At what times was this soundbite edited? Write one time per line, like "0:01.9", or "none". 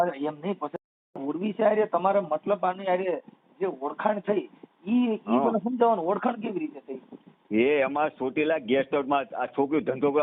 0:01.2